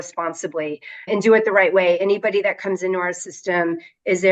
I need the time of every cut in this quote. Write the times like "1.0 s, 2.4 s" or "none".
1.1 s

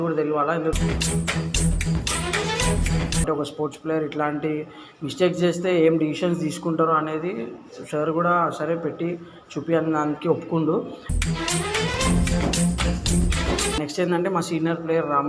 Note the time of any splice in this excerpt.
3.3 s, 13.8 s

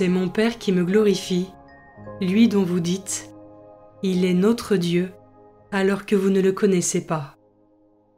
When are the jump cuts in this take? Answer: 7.2 s

